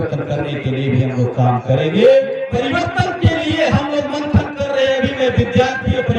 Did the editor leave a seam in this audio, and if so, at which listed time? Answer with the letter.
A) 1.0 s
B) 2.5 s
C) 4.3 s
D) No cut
B